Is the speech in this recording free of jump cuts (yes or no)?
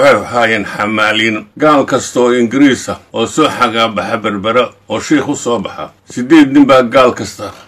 no